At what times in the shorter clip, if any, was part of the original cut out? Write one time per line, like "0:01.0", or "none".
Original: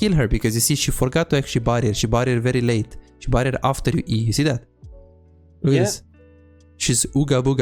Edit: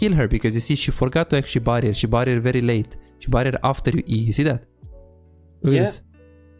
none